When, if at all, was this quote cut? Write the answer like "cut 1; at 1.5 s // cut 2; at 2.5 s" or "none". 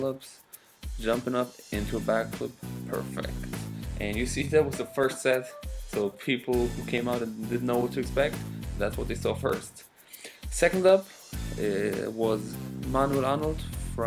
cut 1; at 7.4 s